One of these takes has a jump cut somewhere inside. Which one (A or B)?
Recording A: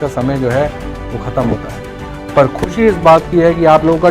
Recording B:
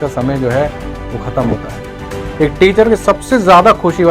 B